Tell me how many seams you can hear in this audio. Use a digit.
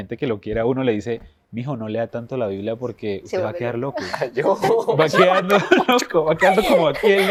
0